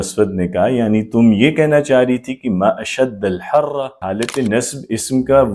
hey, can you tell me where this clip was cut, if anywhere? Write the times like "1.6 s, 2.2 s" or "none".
3.9 s